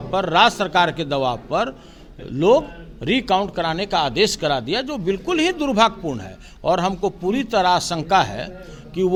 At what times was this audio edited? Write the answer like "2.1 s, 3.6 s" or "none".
none